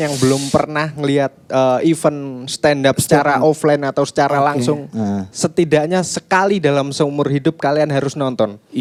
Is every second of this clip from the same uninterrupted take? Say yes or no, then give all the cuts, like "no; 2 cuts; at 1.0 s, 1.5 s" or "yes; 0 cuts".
yes; 0 cuts